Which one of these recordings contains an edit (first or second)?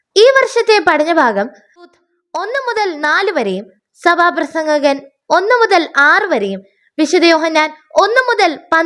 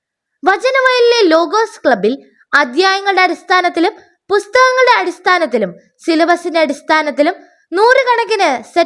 first